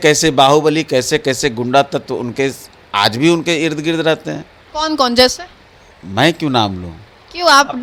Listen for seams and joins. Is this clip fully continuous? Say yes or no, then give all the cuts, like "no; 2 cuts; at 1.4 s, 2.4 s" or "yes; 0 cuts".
yes; 0 cuts